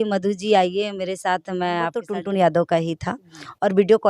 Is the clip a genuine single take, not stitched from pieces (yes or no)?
no